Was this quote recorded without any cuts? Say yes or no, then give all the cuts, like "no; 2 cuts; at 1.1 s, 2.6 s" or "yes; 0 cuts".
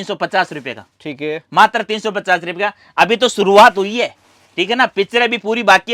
yes; 0 cuts